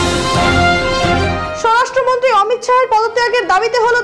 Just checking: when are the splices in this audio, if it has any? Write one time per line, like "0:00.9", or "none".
0:01.1